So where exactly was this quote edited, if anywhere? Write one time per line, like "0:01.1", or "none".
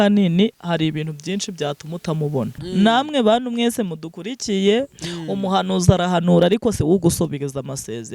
0:02.6